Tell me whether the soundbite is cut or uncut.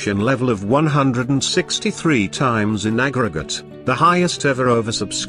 uncut